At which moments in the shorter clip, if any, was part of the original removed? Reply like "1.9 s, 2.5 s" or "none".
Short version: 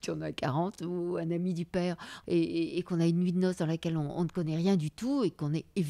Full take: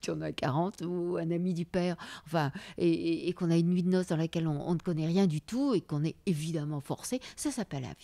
2.1 s